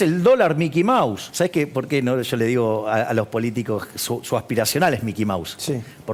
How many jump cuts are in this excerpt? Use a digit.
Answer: 1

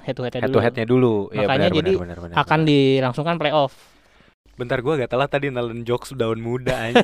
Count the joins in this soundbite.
1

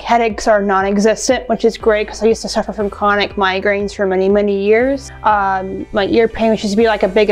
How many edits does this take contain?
1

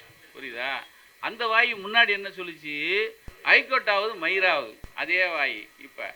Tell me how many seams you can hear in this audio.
2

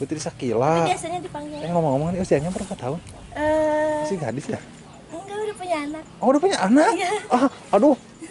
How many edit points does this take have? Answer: 2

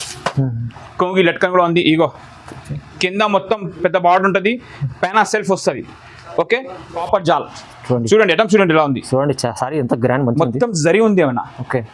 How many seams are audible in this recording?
1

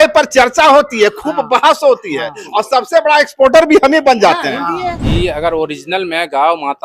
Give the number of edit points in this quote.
1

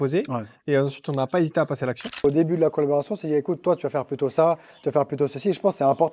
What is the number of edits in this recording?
1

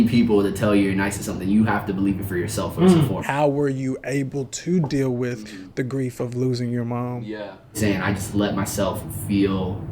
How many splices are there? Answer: 2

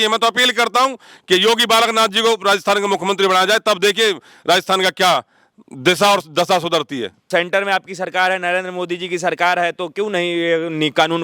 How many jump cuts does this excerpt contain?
1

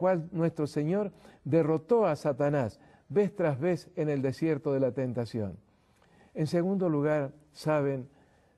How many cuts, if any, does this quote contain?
1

